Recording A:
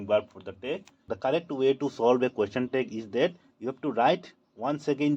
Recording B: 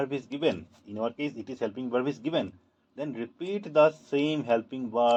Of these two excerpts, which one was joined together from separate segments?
A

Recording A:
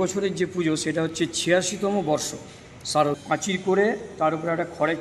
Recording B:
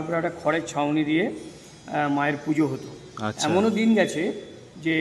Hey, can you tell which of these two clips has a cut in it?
A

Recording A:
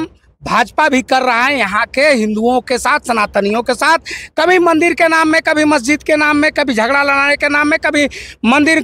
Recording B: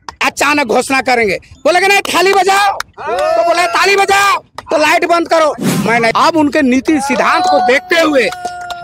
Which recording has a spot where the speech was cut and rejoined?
B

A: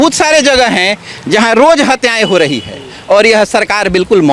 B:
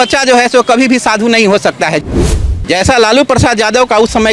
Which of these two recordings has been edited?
B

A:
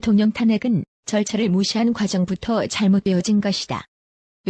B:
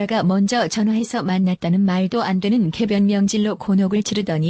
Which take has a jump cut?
B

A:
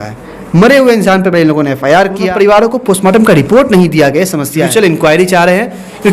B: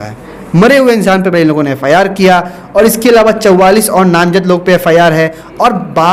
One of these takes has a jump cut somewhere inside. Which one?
A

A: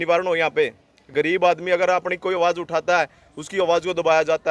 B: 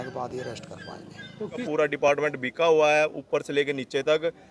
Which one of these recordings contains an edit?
B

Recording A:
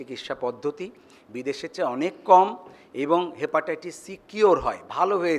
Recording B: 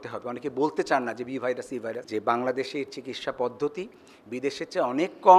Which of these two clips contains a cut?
B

